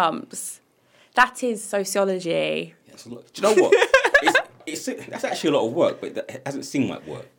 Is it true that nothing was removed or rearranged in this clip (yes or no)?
yes